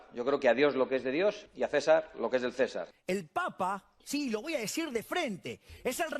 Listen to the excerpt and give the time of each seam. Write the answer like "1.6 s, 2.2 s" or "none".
1.5 s, 2.9 s